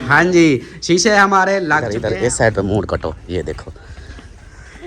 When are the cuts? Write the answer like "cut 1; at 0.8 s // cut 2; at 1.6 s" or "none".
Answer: cut 1; at 1.9 s